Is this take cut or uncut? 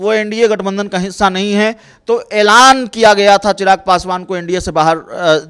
uncut